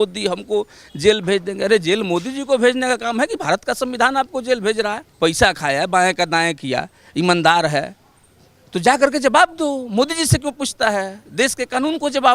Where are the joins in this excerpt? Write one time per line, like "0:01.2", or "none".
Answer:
0:05.0